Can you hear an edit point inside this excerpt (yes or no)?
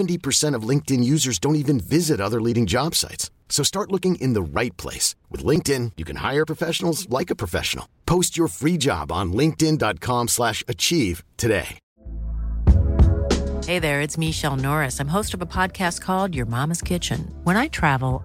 no